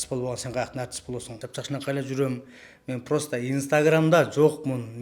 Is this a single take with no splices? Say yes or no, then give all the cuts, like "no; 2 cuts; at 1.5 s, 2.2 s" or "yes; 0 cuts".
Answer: no; 1 cut; at 1.4 s